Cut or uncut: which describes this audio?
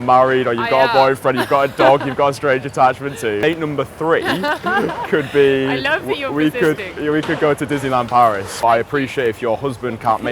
cut